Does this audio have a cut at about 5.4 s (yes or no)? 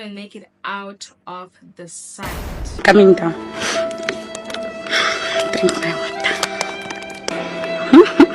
no